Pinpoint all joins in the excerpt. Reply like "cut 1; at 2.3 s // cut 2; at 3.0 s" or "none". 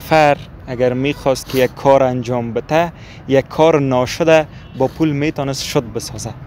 none